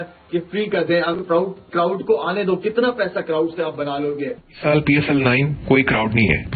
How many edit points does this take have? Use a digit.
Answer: 1